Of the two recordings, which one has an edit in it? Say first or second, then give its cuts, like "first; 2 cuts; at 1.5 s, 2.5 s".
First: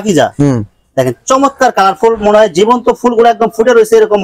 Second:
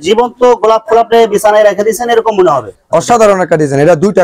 second; 1 cut; at 2.7 s